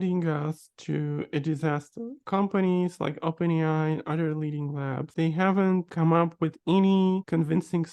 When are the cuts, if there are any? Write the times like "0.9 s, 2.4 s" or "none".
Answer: 2.2 s, 5.1 s